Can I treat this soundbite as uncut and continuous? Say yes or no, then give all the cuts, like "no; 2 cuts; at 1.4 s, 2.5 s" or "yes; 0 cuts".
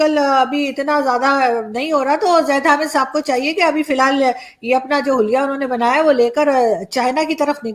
yes; 0 cuts